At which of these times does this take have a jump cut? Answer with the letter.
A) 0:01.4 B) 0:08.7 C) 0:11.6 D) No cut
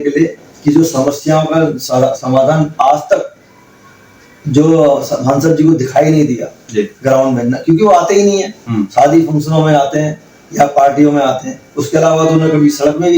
D